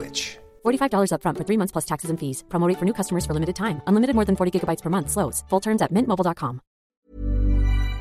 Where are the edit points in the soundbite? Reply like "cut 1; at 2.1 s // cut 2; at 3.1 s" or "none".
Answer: cut 1; at 7.0 s